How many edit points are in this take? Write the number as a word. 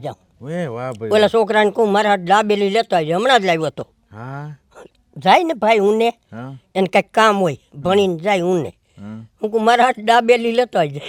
zero